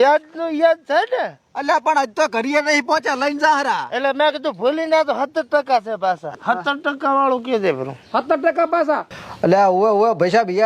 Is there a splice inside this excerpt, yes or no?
yes